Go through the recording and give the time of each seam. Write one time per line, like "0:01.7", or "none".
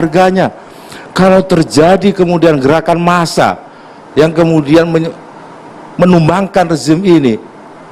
none